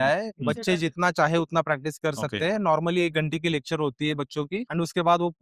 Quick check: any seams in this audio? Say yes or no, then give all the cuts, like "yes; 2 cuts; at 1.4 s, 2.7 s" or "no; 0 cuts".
no; 0 cuts